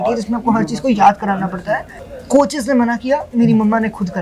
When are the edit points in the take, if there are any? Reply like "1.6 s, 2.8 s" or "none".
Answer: 2.0 s